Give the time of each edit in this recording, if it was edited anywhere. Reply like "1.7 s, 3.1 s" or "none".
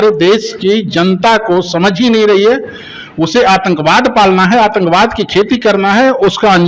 none